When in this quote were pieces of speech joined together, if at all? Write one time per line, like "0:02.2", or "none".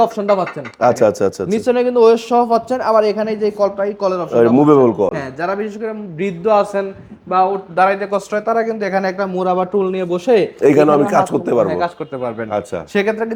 none